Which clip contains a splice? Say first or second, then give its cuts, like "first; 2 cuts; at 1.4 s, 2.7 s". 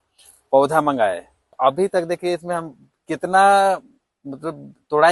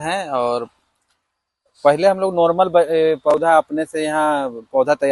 first; 1 cut; at 1.6 s